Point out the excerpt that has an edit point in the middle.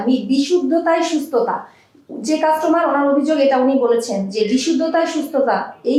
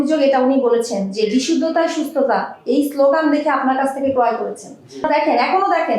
second; 1 cut; at 5.1 s

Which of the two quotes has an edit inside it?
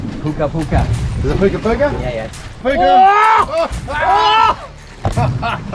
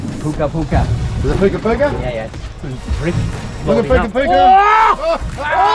first; 1 cut; at 2.6 s

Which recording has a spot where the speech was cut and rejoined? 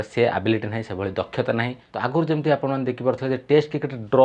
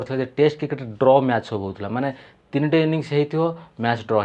first; 1 cut; at 1.8 s

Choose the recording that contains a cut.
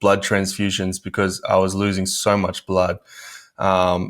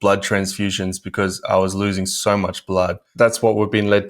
second; 1 cut; at 3.0 s

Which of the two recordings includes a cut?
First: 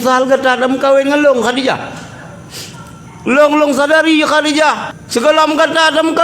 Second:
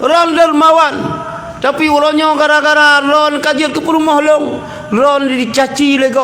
first; 1 cut; at 4.9 s

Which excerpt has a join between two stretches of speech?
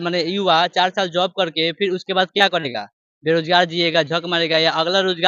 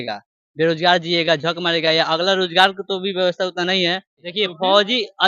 second; 1 cut; at 4.2 s

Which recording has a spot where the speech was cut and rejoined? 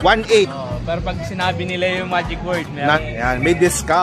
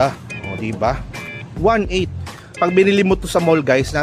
first; 1 cut; at 3.0 s

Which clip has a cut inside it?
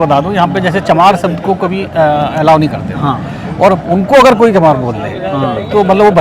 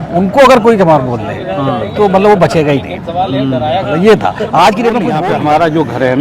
second; 1 cut; at 5.1 s

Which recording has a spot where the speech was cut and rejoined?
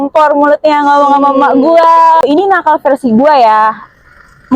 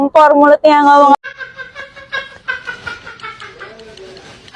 first; 2 cuts; at 1.2 s, 2.2 s

